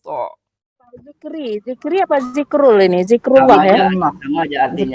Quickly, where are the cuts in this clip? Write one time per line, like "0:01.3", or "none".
0:01.1